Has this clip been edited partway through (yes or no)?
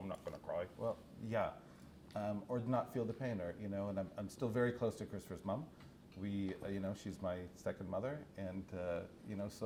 no